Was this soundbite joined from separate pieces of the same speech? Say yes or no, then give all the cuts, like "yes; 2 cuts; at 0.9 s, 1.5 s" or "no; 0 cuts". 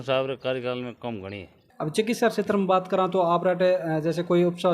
yes; 1 cut; at 1.6 s